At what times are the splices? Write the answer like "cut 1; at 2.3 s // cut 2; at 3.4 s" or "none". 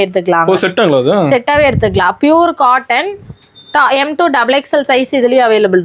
none